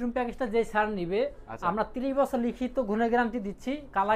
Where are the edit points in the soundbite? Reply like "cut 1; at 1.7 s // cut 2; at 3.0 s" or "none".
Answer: none